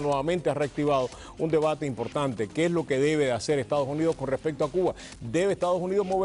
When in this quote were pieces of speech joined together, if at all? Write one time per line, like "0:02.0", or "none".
none